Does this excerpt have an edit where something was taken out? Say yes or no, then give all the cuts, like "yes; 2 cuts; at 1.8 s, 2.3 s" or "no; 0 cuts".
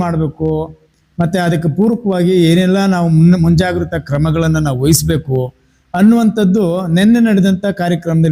no; 0 cuts